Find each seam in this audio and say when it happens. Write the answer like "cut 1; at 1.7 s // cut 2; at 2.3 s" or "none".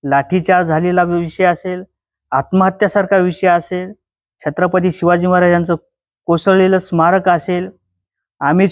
none